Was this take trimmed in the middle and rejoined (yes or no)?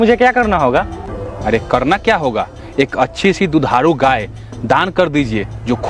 no